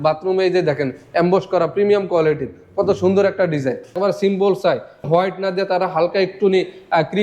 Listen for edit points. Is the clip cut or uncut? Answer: cut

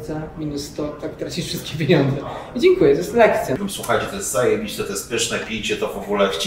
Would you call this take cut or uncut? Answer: cut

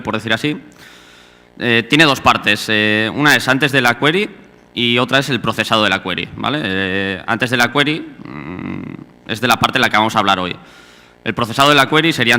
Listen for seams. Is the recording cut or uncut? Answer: uncut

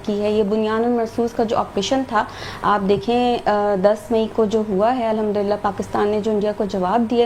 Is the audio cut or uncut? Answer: uncut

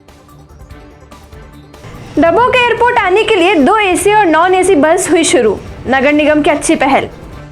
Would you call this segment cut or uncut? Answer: cut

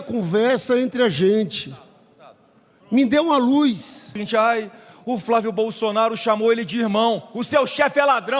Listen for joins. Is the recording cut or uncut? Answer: cut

